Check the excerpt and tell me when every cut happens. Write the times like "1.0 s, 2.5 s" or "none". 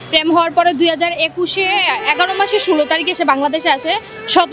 none

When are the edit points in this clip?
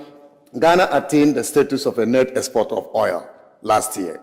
3.3 s

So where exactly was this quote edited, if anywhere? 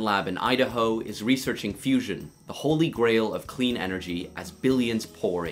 none

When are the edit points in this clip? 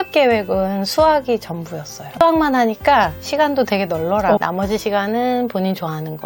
2.0 s, 4.4 s

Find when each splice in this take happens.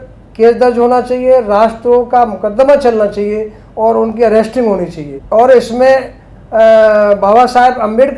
none

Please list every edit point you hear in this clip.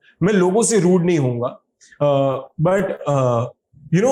none

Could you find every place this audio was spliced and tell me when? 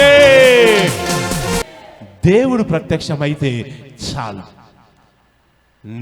1.6 s

